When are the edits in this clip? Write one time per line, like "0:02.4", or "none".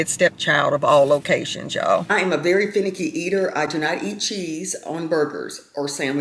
0:02.1